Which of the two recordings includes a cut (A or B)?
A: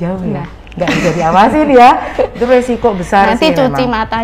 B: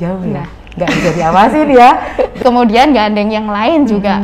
B